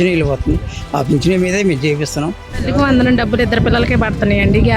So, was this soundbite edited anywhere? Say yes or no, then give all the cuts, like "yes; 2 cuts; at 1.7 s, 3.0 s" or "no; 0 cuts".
yes; 1 cut; at 2.5 s